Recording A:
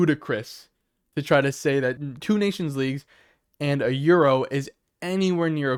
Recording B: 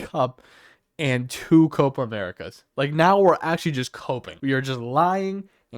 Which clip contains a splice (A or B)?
B